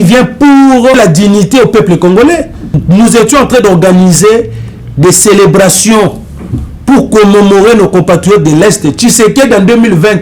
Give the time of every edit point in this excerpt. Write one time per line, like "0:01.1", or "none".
0:01.0
0:02.8